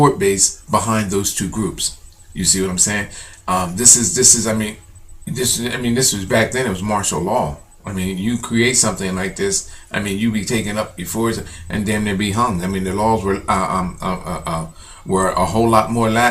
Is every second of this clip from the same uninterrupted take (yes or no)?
no